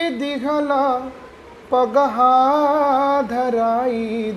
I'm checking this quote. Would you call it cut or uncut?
uncut